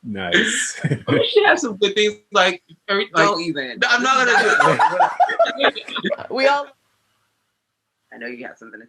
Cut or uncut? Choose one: cut